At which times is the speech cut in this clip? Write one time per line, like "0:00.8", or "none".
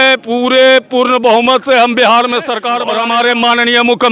0:03.0